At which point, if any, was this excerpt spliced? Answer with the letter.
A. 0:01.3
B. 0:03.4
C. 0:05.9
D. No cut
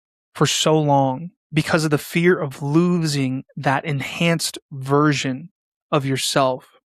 A